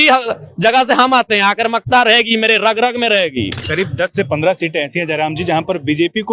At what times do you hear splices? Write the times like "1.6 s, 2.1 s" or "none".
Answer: 3.6 s